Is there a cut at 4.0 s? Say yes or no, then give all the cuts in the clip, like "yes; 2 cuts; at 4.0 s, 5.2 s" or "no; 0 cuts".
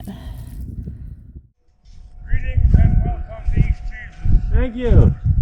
no; 1 cut; at 1.4 s